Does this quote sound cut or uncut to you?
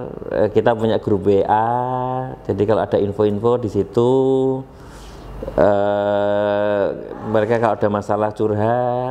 uncut